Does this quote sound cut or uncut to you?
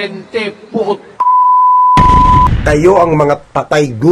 cut